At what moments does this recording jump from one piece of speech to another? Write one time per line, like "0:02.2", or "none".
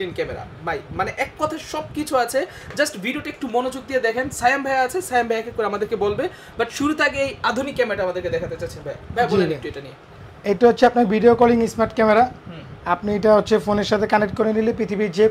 none